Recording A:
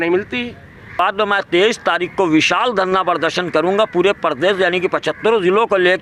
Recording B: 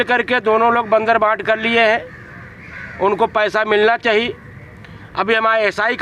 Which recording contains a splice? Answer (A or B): A